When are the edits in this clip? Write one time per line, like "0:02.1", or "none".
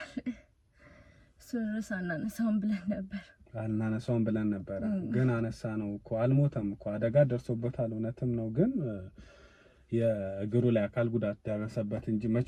none